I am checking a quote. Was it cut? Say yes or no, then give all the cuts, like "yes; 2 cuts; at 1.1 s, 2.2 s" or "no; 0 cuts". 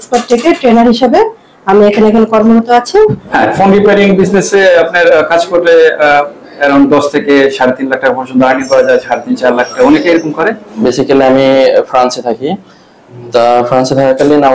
yes; 2 cuts; at 3.2 s, 10.7 s